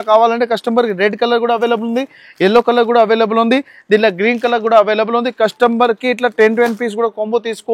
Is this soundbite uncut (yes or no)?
yes